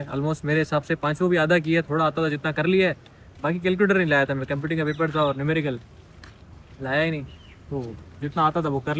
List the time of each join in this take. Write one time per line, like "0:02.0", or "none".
none